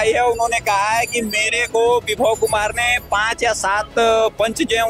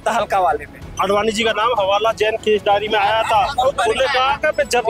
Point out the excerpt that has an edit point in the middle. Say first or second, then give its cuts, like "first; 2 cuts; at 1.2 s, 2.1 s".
second; 1 cut; at 0.9 s